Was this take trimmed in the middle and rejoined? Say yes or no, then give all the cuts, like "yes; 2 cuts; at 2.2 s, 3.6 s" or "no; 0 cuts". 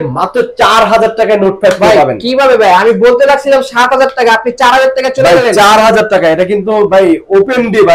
no; 0 cuts